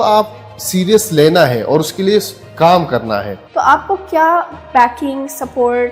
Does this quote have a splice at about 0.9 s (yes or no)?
no